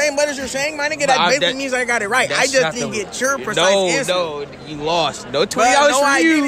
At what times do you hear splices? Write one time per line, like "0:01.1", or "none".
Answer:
none